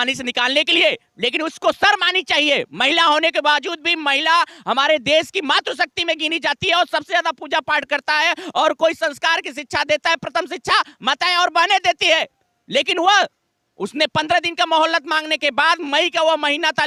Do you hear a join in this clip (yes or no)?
no